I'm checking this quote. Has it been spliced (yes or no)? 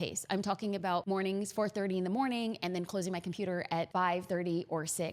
yes